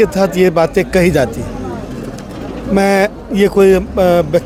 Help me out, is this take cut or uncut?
uncut